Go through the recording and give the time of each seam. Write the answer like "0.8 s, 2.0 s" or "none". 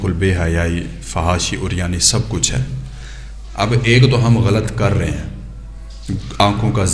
none

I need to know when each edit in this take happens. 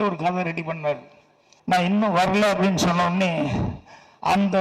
1.9 s

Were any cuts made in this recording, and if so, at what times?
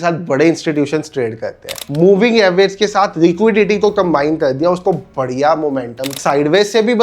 1.9 s, 6.2 s

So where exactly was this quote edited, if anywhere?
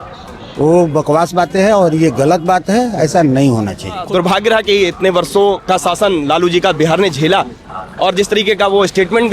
4.0 s

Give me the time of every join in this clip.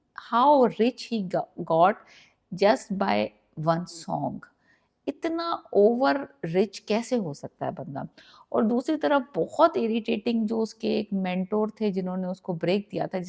none

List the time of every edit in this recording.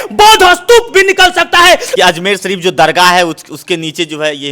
1.9 s

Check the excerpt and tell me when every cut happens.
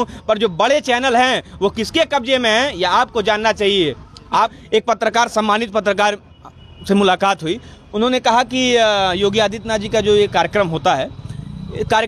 4.5 s

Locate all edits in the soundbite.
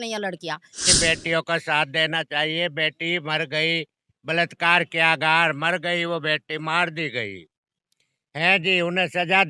0.9 s

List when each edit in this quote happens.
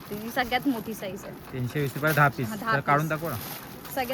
none

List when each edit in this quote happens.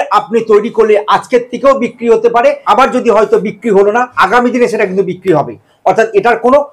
2.6 s, 4.1 s

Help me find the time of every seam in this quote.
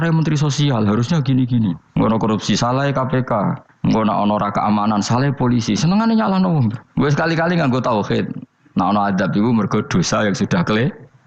1.8 s, 3.7 s

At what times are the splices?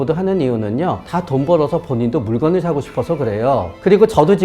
1.0 s

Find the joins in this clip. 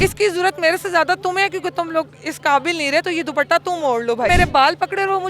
4.3 s

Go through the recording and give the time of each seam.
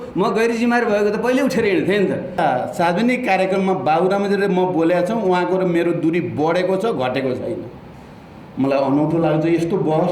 2.4 s

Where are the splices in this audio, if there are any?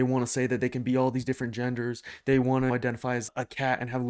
3.0 s

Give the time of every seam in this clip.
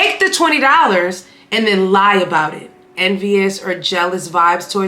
2.9 s

